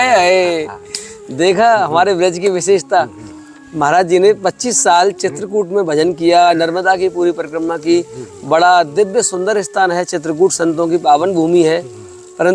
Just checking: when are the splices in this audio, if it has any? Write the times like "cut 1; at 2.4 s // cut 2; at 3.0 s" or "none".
none